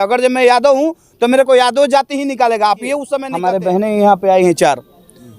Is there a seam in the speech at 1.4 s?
no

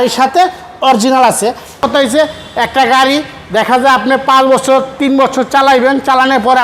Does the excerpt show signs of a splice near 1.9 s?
yes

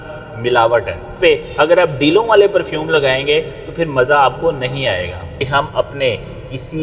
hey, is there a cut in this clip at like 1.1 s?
yes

